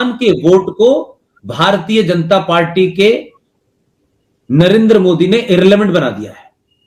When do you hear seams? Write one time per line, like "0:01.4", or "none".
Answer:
none

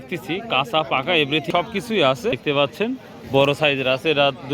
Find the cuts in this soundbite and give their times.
none

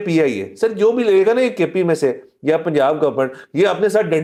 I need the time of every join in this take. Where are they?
none

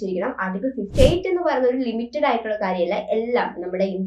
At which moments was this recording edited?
0:00.9

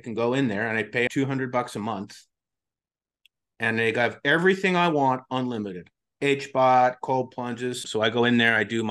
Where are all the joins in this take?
0:01.1
0:07.8

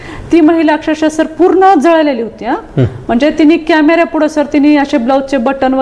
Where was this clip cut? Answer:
none

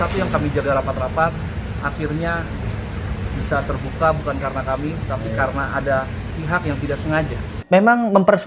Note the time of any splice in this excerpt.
0:07.5

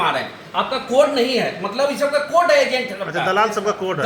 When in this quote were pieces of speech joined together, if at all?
none

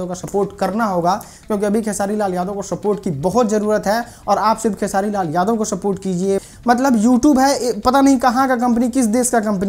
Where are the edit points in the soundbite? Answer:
0:06.5

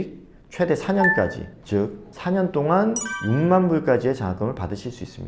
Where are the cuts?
none

